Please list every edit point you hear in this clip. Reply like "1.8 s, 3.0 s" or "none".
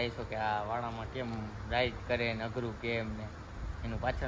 none